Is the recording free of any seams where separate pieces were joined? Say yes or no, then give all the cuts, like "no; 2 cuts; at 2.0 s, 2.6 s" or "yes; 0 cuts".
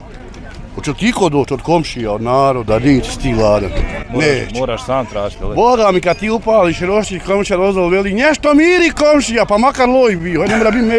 yes; 0 cuts